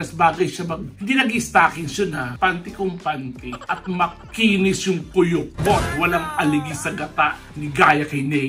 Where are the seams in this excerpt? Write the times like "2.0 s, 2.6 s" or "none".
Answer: none